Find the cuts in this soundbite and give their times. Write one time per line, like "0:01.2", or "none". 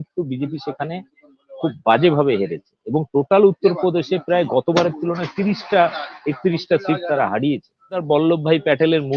0:08.0